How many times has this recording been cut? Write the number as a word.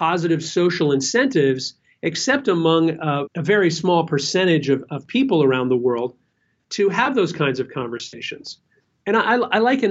one